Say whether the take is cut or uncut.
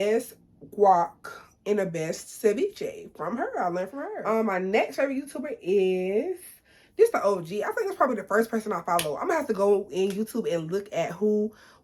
uncut